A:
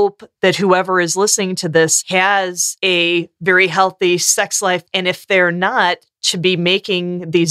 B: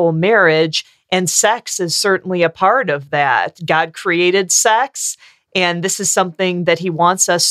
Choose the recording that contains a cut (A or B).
A